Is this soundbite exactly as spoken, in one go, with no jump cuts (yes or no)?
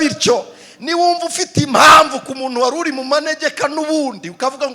yes